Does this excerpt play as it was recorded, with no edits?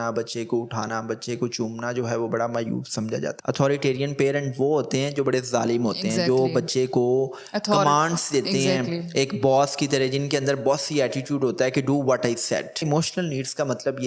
no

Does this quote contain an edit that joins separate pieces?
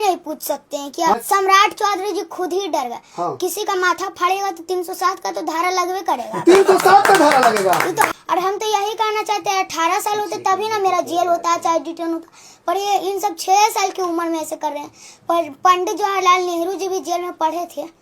yes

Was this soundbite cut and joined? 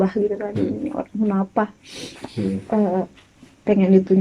no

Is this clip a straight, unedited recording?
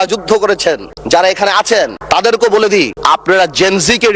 no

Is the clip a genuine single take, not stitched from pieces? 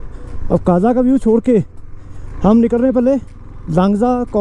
yes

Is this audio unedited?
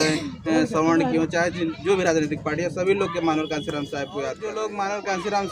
no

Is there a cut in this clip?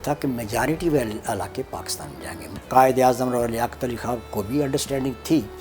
yes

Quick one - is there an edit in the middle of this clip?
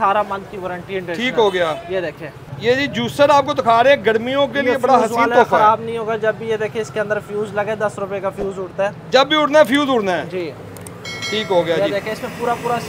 no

